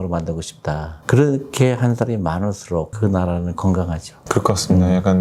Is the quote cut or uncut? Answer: uncut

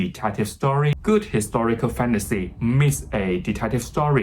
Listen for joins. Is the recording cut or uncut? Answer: cut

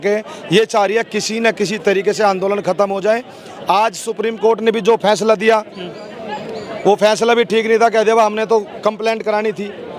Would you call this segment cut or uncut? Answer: uncut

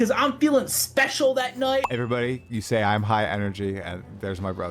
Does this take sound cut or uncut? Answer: cut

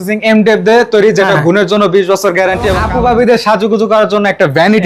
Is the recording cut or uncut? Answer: cut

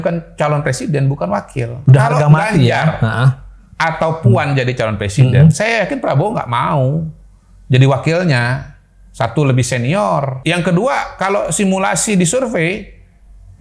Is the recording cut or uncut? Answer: cut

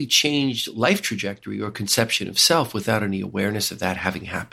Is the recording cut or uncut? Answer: uncut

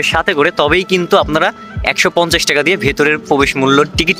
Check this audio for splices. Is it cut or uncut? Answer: uncut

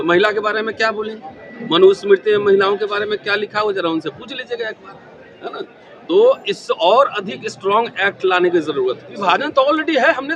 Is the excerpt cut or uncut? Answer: cut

